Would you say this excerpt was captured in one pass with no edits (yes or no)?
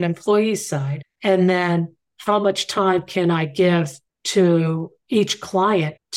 yes